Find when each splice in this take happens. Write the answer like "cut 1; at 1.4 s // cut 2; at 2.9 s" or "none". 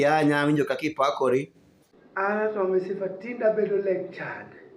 cut 1; at 2.3 s